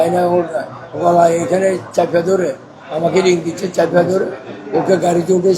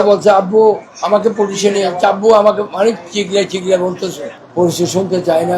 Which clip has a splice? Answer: second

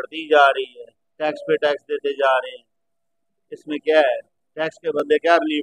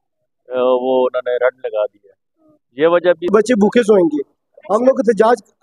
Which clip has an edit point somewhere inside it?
second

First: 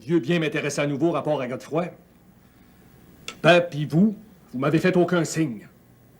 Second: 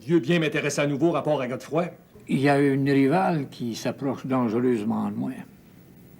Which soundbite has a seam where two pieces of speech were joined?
second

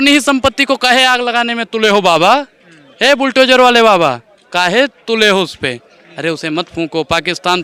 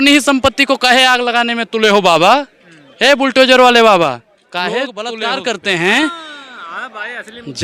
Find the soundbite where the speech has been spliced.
second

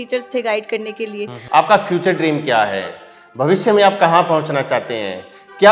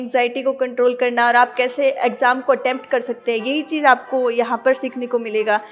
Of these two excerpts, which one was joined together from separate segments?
first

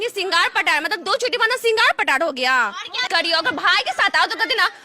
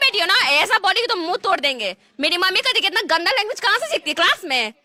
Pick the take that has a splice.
first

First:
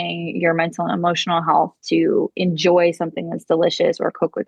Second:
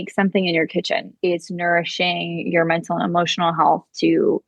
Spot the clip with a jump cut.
second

